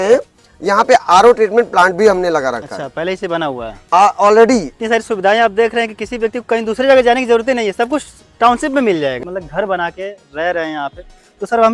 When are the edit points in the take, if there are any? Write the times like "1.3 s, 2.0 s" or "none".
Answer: 4.7 s, 9.2 s